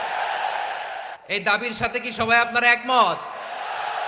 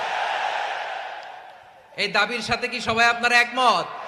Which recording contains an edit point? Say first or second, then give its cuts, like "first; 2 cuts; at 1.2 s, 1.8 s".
first; 1 cut; at 1.1 s